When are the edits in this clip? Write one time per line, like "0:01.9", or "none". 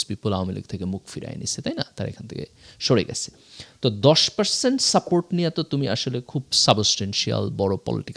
none